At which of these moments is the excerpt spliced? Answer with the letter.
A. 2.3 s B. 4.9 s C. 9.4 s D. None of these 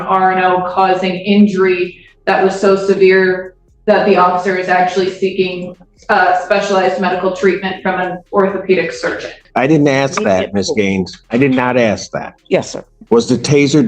C